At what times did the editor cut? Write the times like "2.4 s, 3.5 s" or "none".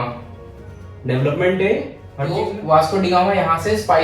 2.4 s